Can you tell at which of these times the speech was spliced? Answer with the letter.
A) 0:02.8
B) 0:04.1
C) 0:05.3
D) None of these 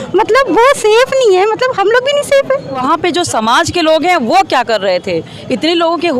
A